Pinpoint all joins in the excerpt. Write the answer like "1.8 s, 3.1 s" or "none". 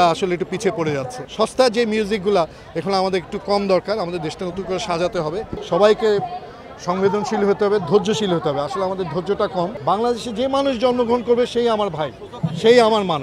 1.2 s, 5.5 s, 9.8 s